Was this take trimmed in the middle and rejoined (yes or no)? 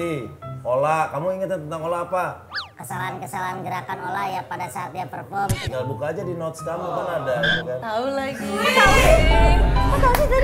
no